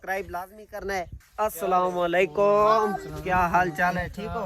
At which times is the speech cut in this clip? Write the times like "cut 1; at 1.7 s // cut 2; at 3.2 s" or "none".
cut 1; at 1.2 s